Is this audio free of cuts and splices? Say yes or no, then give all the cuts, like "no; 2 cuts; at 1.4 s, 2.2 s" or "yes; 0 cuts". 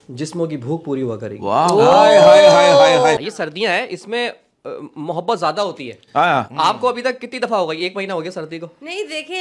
no; 1 cut; at 3.2 s